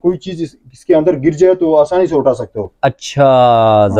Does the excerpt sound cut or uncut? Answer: uncut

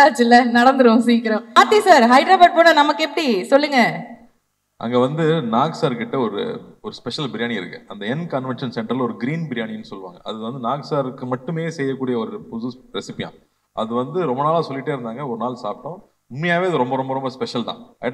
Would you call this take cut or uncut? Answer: cut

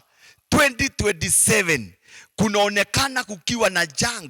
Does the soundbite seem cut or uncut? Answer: uncut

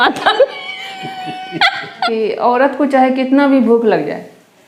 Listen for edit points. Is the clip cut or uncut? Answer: cut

